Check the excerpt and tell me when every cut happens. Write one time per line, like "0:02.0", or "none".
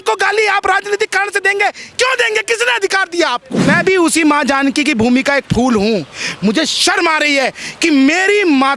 0:03.7